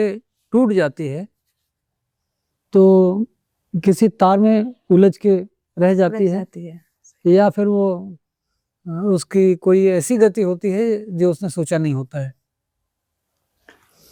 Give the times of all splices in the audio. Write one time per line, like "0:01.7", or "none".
none